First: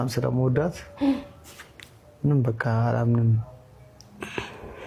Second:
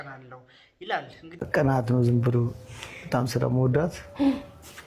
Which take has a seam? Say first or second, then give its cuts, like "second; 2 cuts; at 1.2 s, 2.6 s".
second; 1 cut; at 1.5 s